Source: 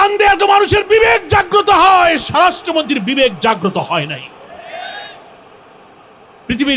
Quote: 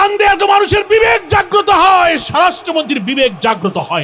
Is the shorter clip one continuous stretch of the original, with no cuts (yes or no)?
yes